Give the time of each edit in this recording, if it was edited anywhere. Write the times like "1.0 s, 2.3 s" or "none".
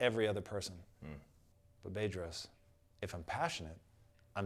none

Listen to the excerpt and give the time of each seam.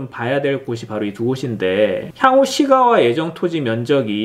2.1 s

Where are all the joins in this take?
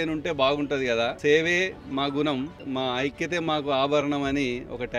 1.2 s, 2.6 s

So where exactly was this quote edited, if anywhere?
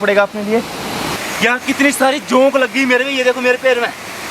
1.2 s

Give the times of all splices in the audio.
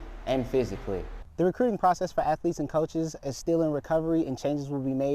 1.2 s

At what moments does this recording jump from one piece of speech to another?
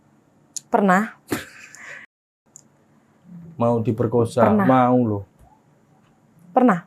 1.9 s

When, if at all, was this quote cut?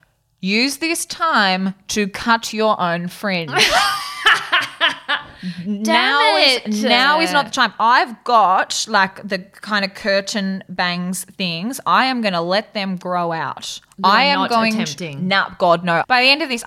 none

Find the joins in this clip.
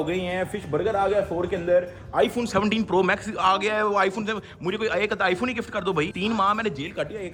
none

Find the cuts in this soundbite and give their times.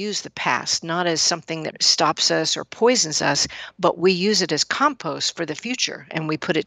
1.8 s

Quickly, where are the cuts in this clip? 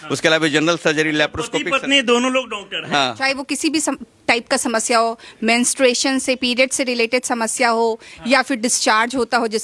3.2 s

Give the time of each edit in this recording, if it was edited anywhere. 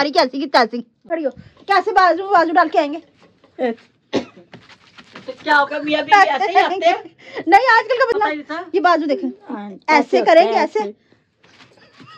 1.0 s, 8.1 s

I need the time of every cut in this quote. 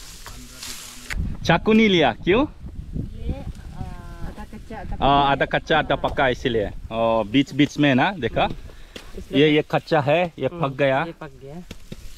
1.0 s

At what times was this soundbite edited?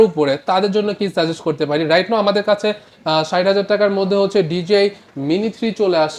none

